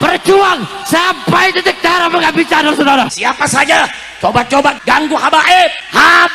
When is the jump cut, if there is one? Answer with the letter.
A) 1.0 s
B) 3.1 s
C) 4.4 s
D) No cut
B